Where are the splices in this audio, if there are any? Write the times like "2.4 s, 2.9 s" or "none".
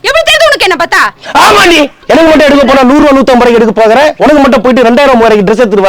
2.0 s